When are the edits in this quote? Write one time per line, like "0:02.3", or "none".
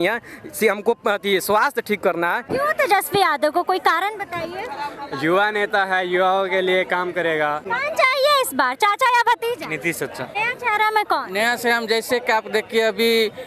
0:02.4
0:07.6
0:10.4